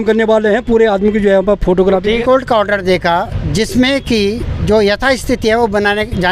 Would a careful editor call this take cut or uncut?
cut